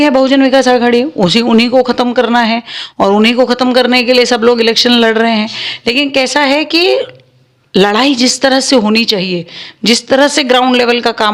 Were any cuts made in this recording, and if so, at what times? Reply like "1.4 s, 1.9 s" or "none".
none

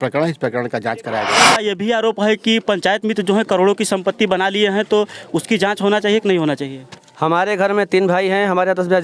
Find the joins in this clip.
1.6 s

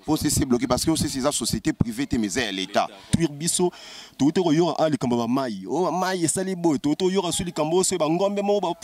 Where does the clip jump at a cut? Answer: 3.1 s

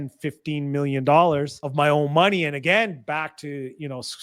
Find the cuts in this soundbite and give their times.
1.6 s

